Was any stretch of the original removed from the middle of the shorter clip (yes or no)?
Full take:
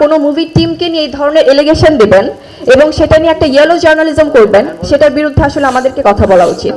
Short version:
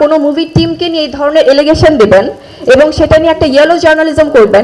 no